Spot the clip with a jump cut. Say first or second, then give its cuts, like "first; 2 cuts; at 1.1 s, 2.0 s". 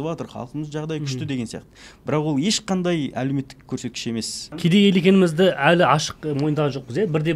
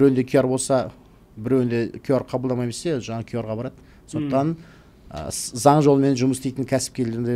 first; 1 cut; at 4.6 s